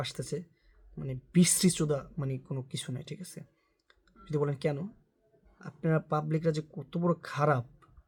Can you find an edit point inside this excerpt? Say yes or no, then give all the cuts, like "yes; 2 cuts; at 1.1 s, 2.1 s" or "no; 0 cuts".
no; 0 cuts